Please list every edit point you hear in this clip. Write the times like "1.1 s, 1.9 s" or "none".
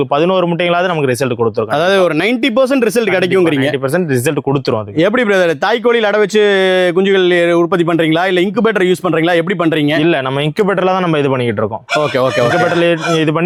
none